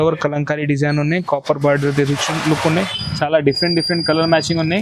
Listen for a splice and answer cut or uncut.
cut